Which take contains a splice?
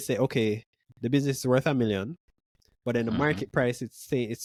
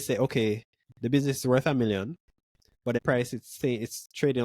second; 1 cut; at 3.0 s

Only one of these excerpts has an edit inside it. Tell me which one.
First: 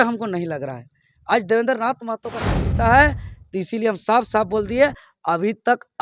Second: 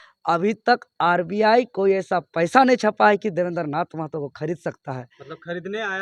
first; 1 cut; at 2.5 s

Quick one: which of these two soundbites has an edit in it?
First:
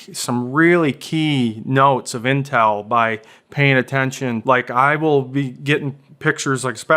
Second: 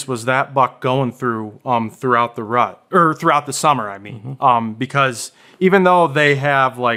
first; 1 cut; at 4.4 s

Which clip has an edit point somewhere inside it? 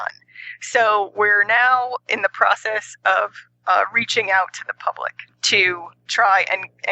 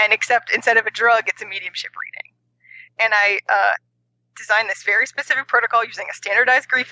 first; 1 cut; at 5.5 s

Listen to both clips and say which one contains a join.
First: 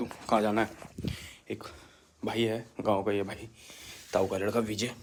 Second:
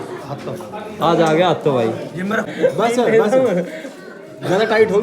second; 1 cut; at 2.5 s

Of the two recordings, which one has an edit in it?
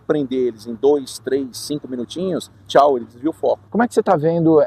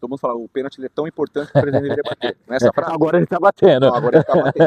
first; 1 cut; at 3.7 s

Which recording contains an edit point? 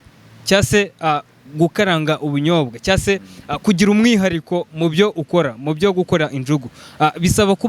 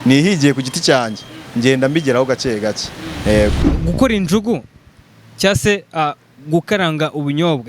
second; 1 cut; at 3.7 s

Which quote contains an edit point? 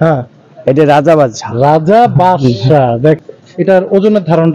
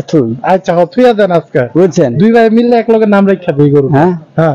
first; 1 cut; at 3.2 s

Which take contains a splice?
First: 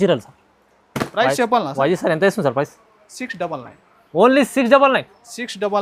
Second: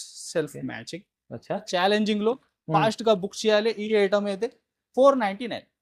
second; 1 cut; at 1.7 s

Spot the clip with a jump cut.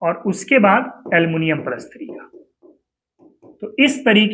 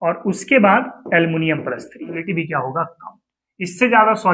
second; 1 cut; at 2.2 s

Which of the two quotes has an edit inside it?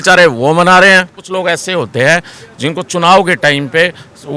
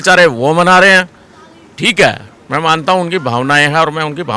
first; 1 cut; at 1.2 s

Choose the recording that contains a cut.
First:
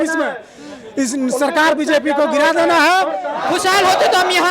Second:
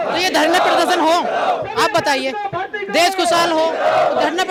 first; 1 cut; at 3.3 s

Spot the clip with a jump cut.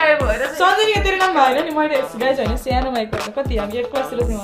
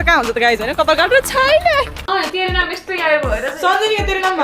second; 1 cut; at 2.1 s

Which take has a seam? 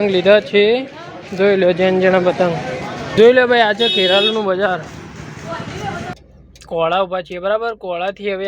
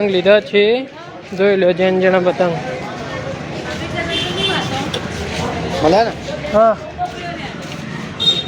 first; 2 cuts; at 3.1 s, 6.2 s

